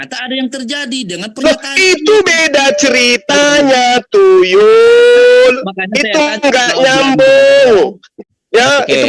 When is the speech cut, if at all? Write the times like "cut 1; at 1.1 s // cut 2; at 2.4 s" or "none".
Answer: cut 1; at 8.2 s